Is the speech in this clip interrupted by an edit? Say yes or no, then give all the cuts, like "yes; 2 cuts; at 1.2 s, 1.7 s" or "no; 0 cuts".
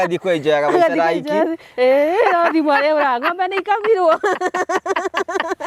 no; 0 cuts